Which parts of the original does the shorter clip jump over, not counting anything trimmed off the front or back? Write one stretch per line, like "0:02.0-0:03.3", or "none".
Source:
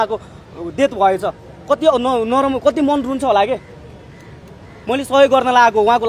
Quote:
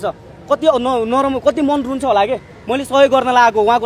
0:03.7-0:04.7